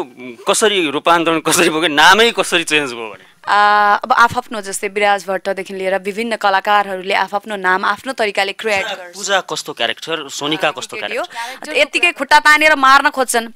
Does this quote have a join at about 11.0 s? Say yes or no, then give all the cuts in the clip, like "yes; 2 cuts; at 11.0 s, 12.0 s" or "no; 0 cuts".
yes; 1 cut; at 11.0 s